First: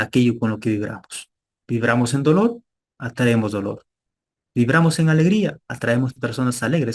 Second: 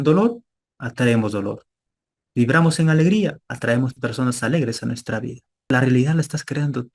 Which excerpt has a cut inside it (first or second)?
second